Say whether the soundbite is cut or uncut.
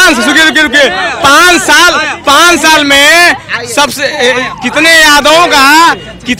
uncut